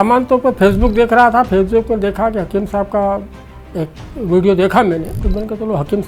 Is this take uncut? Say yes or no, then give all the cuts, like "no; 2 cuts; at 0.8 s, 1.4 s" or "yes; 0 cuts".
no; 1 cut; at 5.2 s